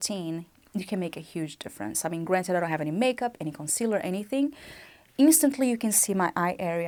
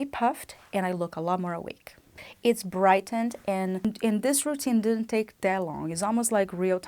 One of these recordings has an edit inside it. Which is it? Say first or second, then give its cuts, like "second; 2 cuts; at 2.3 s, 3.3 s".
second; 1 cut; at 3.9 s